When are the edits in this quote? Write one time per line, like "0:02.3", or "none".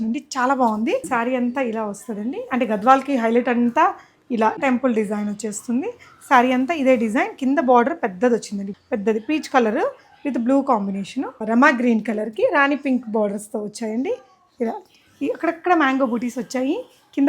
0:01.1
0:04.6
0:08.7
0:11.4